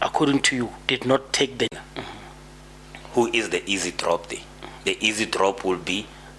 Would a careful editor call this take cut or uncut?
cut